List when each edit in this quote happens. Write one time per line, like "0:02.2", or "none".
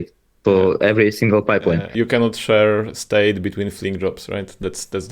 0:01.9